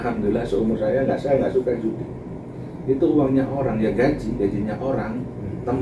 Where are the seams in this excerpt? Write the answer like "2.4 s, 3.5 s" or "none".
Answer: none